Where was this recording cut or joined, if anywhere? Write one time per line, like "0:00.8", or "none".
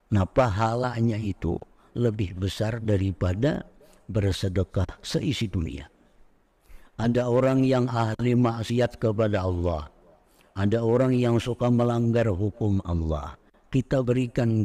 none